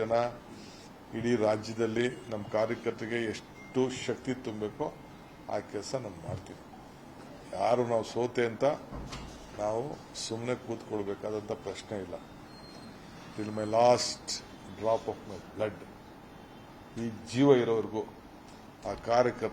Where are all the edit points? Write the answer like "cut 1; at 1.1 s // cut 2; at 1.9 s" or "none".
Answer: cut 1; at 6.9 s